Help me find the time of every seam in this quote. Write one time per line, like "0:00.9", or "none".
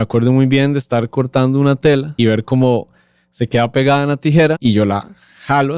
0:02.1
0:04.6